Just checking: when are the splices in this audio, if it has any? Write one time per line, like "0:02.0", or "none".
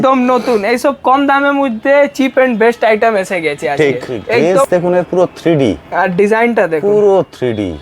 0:04.5